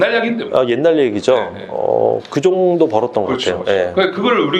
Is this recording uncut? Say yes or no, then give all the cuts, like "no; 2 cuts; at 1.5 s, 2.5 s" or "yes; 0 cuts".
yes; 0 cuts